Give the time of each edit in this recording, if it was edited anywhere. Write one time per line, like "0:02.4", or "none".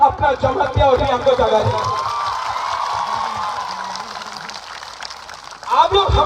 0:03.9